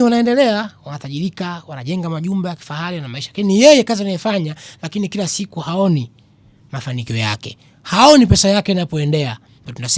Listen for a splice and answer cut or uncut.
uncut